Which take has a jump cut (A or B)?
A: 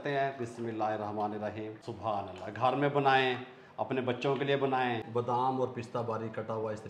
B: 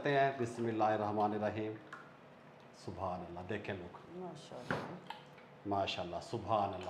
A